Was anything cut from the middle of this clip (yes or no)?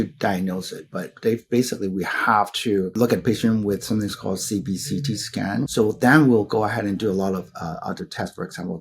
yes